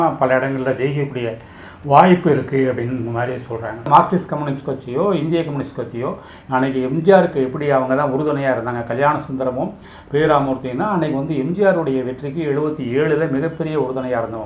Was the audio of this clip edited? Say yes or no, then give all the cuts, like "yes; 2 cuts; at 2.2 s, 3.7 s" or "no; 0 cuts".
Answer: yes; 1 cut; at 3.9 s